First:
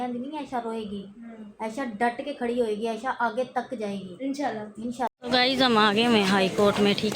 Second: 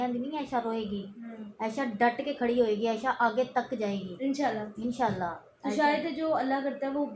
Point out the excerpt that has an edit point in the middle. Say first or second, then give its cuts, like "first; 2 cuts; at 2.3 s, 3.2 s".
first; 1 cut; at 5.1 s